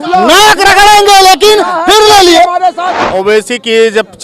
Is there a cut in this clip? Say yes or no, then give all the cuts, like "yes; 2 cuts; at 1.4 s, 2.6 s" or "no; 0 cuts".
yes; 1 cut; at 2.9 s